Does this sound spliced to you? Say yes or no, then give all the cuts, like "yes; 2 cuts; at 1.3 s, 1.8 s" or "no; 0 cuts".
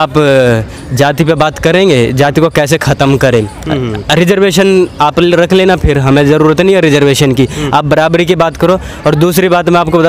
no; 0 cuts